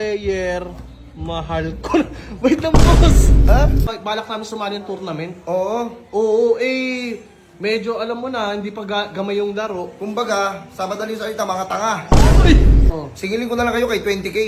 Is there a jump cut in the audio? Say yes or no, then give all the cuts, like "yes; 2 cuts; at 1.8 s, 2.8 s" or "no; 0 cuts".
yes; 2 cuts; at 3.9 s, 12.9 s